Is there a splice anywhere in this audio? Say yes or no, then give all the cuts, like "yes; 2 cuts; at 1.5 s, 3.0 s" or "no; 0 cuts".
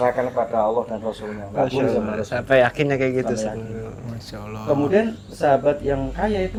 no; 0 cuts